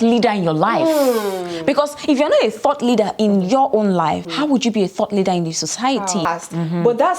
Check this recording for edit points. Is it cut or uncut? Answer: cut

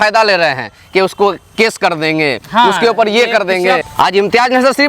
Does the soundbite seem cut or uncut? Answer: cut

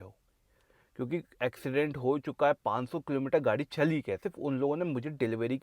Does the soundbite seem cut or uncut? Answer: cut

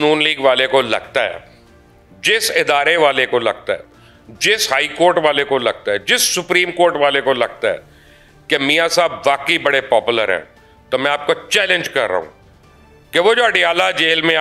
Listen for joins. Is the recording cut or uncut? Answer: uncut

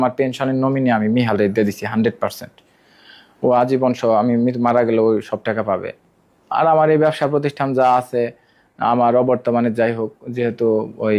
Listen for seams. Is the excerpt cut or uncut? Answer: uncut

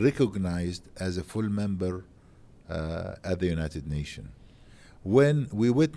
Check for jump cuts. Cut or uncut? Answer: uncut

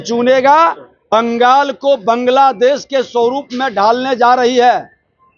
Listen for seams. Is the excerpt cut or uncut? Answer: cut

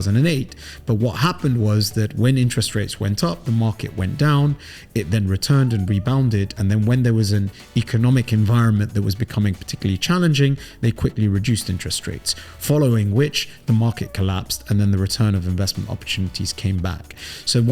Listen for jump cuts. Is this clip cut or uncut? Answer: uncut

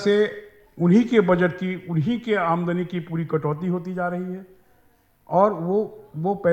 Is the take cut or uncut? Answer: uncut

